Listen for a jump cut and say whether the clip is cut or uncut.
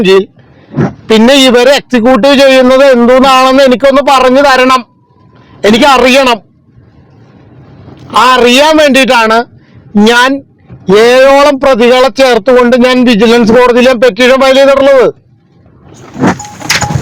uncut